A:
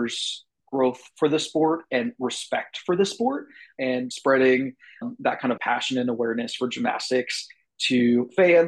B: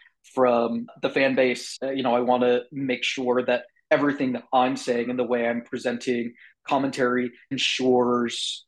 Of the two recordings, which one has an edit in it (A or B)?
A